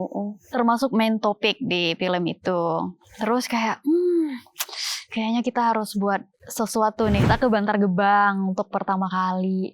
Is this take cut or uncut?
cut